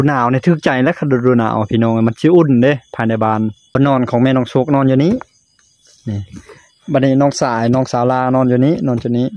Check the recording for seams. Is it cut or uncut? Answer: cut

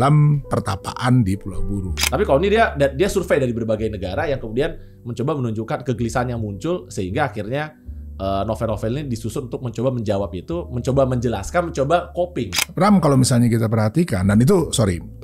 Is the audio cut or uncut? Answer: cut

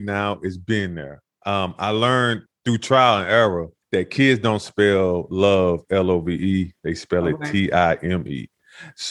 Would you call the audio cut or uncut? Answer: cut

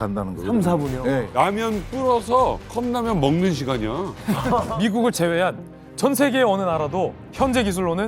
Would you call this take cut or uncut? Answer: cut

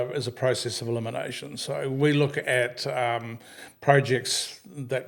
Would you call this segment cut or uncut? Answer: uncut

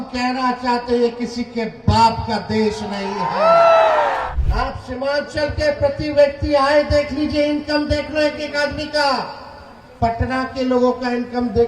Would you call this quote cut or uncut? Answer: cut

